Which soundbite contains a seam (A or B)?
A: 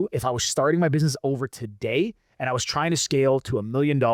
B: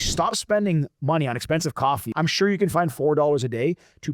B